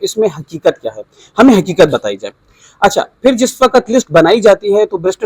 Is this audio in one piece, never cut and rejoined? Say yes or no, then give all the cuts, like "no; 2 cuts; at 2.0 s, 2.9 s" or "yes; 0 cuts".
yes; 0 cuts